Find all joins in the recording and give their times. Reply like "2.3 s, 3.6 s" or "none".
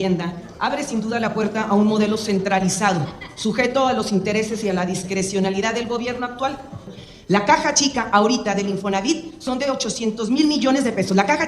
7.0 s